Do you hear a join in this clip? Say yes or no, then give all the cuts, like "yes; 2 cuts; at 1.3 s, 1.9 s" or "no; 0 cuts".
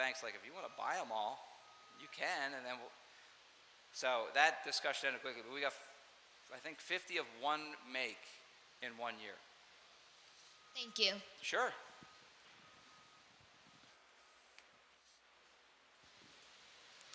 yes; 1 cut; at 13.3 s